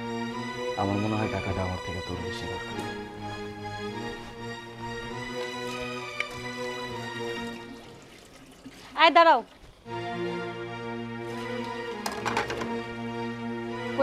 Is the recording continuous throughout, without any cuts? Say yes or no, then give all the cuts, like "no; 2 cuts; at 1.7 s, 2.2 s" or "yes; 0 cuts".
yes; 0 cuts